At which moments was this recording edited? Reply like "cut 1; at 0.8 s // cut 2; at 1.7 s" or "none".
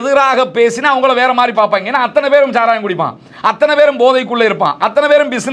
none

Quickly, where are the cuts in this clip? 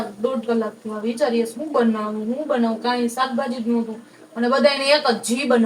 none

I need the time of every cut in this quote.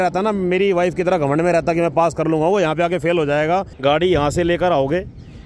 cut 1; at 3.7 s

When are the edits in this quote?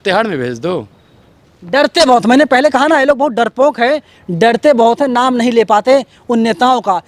none

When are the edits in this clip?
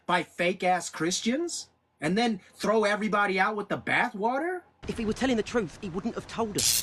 cut 1; at 4.7 s

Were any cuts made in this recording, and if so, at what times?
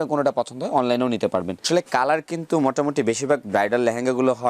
cut 1; at 1.6 s

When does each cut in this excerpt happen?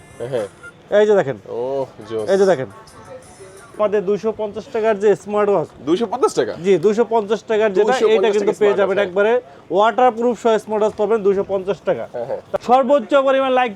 cut 1; at 3.8 s // cut 2; at 12.5 s

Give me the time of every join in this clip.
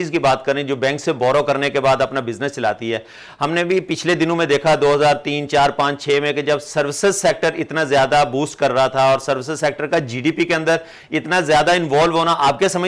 none

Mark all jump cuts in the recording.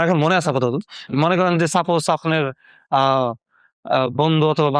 cut 1; at 1.1 s

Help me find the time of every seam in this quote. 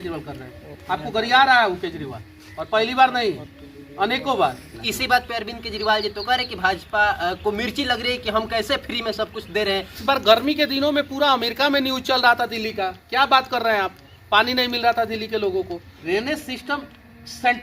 cut 1; at 4.7 s // cut 2; at 10.0 s // cut 3; at 16.0 s

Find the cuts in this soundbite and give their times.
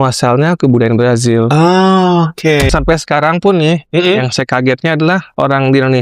cut 1; at 2.7 s

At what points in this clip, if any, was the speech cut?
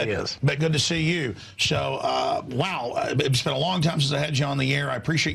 cut 1; at 0.9 s

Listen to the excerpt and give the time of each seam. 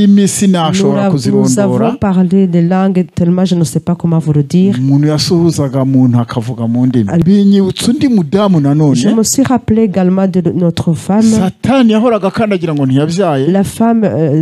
cut 1; at 7.2 s

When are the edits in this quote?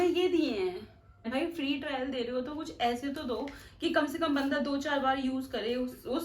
cut 1; at 1.2 s

